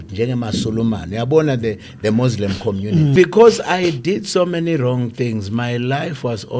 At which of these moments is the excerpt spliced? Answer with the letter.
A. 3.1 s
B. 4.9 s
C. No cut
A